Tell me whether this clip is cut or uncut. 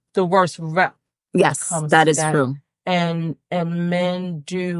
uncut